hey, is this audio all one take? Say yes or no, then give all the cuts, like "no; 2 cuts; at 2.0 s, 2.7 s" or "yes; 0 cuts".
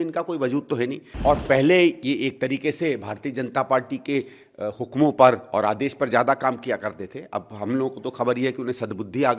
no; 1 cut; at 1.1 s